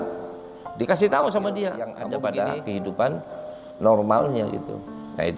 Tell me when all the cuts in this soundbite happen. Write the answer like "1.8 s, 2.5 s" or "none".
1.9 s